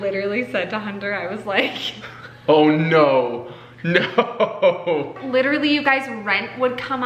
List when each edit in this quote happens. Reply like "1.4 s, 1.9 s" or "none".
5.1 s